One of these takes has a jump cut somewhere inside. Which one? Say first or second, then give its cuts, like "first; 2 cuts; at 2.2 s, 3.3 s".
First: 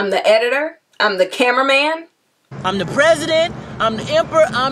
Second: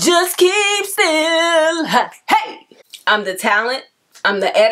second; 1 cut; at 2.9 s